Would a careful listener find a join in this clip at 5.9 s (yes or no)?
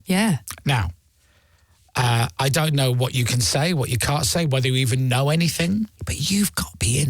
yes